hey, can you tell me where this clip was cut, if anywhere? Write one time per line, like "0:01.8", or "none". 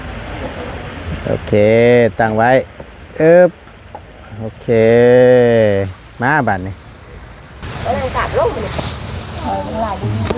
0:08.7